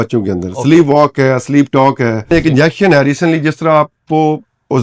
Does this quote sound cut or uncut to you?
cut